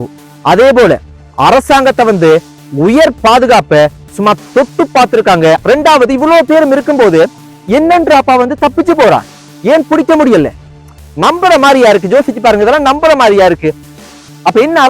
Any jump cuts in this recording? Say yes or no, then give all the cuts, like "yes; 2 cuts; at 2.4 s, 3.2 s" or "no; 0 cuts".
yes; 2 cuts; at 5.6 s, 13.9 s